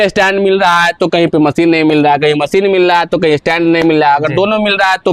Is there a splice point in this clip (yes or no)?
no